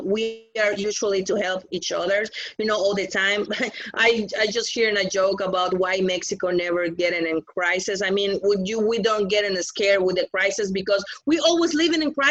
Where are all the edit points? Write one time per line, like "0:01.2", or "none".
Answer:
none